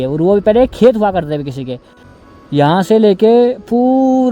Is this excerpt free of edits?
no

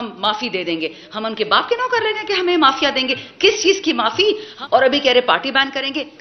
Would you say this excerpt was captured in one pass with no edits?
no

